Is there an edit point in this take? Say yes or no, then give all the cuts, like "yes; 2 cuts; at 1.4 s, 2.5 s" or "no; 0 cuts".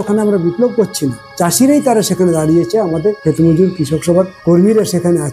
yes; 3 cuts; at 1.2 s, 3.2 s, 4.3 s